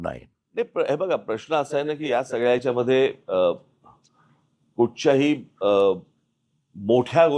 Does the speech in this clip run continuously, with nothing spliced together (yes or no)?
no